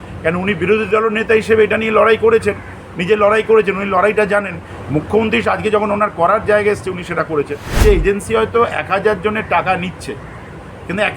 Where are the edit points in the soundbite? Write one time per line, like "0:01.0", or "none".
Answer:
0:07.7